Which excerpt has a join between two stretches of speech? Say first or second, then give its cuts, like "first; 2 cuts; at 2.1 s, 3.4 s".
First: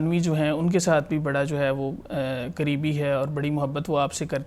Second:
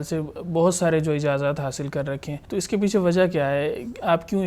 second; 1 cut; at 2.3 s